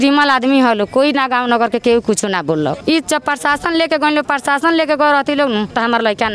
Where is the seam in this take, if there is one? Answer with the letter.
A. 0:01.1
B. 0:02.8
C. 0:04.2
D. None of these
B